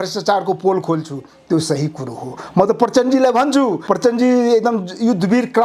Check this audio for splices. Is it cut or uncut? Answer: cut